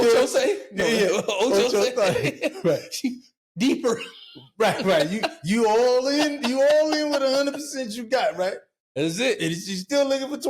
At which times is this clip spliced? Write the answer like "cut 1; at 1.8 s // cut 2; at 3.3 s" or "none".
none